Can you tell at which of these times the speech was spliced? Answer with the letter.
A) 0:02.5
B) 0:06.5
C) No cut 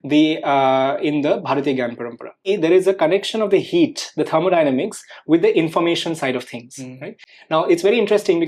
A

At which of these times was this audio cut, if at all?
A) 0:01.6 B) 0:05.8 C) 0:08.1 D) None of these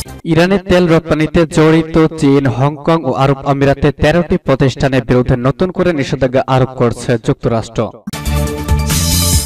C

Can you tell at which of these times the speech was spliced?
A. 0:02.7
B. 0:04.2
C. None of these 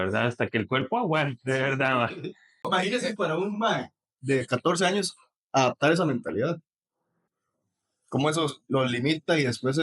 A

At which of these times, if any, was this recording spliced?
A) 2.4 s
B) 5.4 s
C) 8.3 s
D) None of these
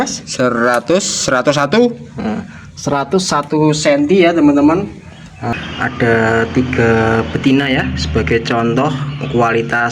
B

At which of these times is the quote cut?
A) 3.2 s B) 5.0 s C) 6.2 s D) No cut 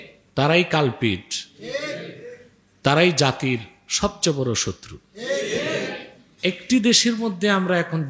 C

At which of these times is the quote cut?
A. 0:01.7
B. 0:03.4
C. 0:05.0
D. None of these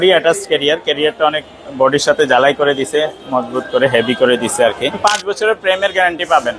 C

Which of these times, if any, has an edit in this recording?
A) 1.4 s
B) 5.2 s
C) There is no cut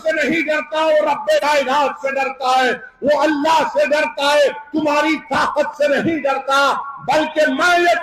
A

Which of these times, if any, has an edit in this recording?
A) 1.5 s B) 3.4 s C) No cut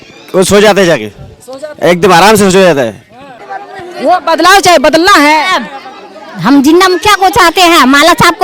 B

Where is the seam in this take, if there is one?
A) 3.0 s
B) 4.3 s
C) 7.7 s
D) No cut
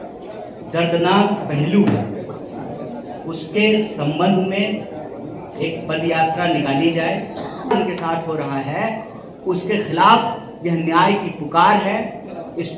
C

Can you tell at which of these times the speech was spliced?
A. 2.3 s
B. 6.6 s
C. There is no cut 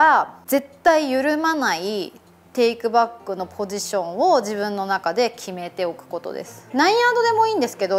B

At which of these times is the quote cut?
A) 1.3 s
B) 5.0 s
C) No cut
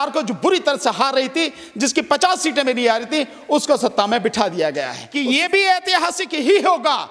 B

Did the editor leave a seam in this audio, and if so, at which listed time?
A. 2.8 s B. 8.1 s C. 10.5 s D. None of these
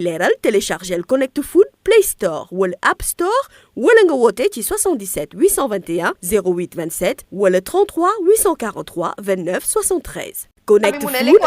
C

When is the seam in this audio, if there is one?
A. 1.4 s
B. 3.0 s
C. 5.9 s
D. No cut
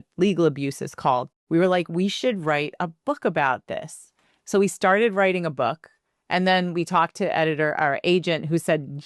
A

